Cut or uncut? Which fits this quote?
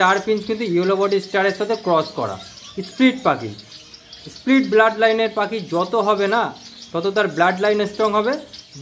uncut